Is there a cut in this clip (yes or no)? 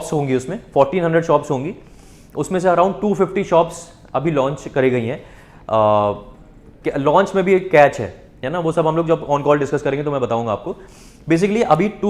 no